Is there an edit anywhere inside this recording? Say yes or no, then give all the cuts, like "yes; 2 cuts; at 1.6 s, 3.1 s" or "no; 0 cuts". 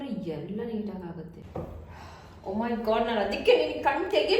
yes; 1 cut; at 1.4 s